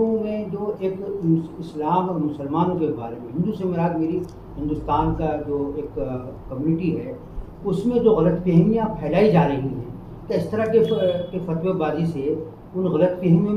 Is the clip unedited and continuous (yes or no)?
yes